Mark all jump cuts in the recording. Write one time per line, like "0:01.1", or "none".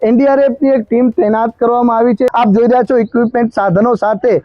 0:02.3